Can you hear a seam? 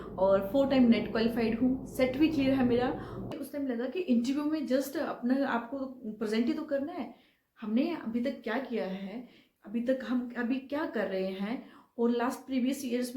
yes; 1 cut; at 3.3 s

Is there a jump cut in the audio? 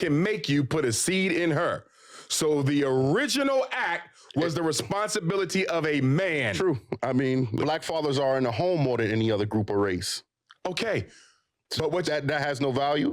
yes; 1 cut; at 7.6 s

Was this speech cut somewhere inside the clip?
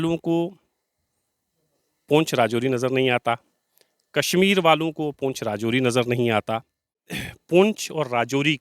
yes; 1 cut; at 7.3 s

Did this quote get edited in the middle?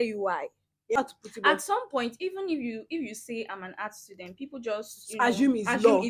yes; 1 cut; at 1.0 s

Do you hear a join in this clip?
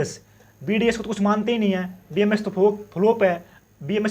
no; 0 cuts

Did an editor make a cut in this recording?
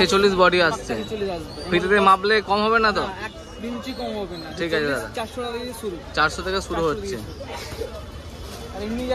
no; 0 cuts

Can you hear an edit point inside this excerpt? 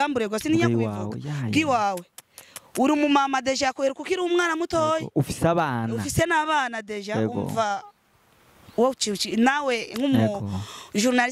no; 0 cuts

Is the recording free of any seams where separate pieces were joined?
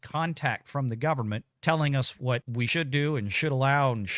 no; 2 cuts; at 1.5 s, 2.6 s

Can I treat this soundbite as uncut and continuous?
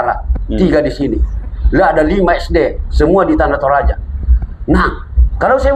yes; 0 cuts

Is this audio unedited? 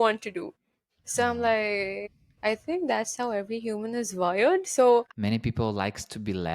no; 1 cut; at 5.1 s

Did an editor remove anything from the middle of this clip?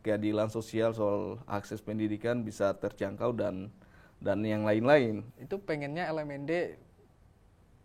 yes; 1 cut; at 5.3 s

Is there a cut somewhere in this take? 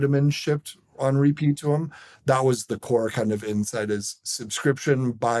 no; 0 cuts

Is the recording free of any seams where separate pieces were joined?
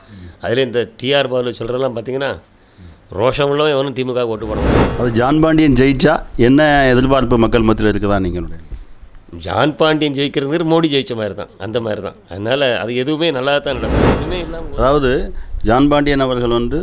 no; 2 cuts; at 4.8 s, 14.1 s

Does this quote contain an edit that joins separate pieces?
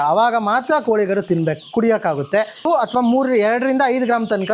yes; 1 cut; at 2.7 s

